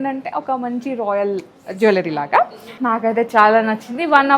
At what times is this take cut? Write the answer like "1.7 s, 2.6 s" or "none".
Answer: 2.8 s